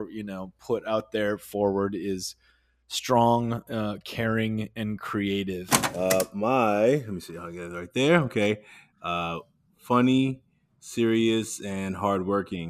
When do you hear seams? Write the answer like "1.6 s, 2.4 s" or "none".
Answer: 5.8 s